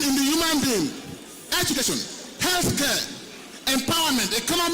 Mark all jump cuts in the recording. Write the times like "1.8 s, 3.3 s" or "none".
1.7 s